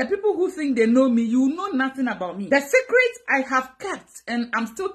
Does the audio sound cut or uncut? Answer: cut